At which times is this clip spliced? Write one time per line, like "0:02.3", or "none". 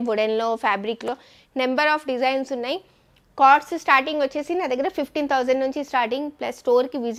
none